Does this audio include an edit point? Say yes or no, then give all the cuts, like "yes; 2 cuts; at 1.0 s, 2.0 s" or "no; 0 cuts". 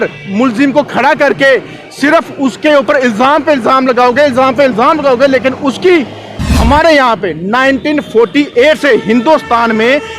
yes; 1 cut; at 6.3 s